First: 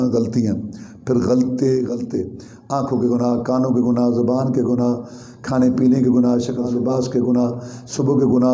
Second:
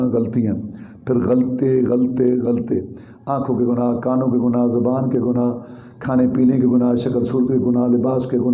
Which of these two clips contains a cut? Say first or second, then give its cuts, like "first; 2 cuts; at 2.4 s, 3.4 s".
first; 2 cuts; at 1.9 s, 6.7 s